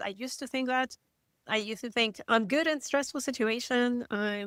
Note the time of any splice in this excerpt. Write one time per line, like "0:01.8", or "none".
none